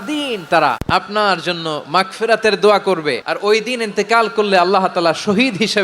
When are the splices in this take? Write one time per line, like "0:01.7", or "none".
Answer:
0:00.8
0:03.3